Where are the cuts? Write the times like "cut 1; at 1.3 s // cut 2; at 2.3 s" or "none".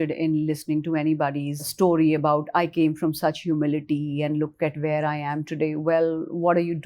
cut 1; at 1.7 s